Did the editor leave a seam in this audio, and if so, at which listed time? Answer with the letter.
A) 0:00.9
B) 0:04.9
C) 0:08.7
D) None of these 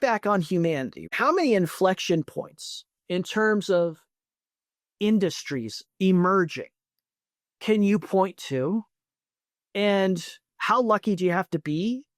A